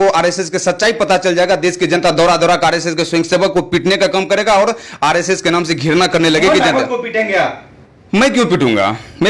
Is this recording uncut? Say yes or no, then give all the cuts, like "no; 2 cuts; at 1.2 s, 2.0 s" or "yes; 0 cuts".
yes; 0 cuts